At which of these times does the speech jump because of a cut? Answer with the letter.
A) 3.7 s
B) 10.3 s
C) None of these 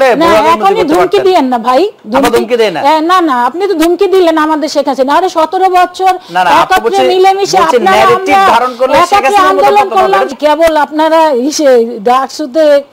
B